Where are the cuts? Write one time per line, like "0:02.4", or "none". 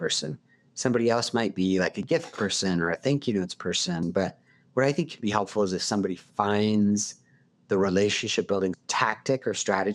0:04.0
0:08.8